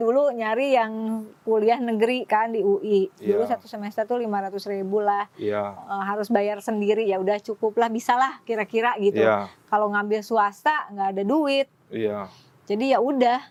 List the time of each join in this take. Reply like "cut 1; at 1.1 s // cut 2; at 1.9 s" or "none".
none